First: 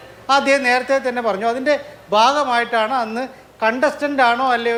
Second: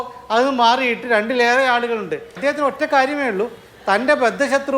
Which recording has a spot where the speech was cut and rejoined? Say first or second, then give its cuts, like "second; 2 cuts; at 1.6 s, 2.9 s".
second; 1 cut; at 2.4 s